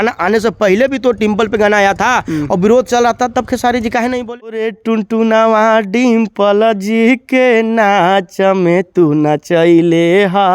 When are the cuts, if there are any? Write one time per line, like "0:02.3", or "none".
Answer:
0:04.7